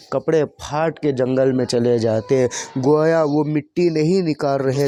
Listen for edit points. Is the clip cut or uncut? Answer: uncut